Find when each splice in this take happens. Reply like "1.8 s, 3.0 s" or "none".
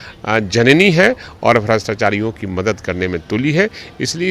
none